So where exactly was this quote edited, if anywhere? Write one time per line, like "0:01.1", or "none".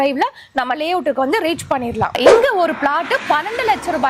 0:02.2